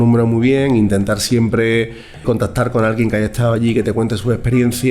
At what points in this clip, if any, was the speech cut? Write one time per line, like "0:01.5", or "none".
0:02.2